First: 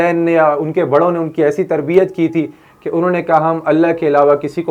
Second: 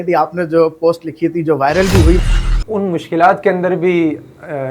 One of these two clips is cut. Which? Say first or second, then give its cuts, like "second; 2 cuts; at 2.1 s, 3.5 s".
second; 1 cut; at 2.3 s